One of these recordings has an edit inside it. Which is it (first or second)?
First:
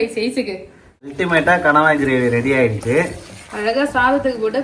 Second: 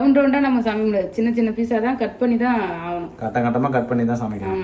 first